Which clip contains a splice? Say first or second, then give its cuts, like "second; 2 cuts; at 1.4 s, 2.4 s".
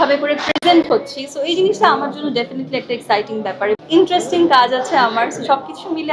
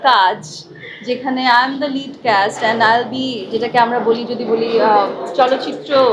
first; 1 cut; at 3.8 s